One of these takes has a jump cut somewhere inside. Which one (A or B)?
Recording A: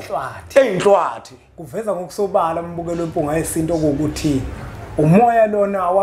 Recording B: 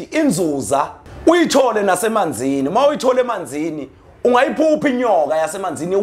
B